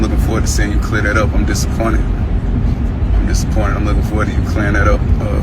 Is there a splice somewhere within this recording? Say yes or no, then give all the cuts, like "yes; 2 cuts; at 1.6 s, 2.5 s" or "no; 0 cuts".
no; 0 cuts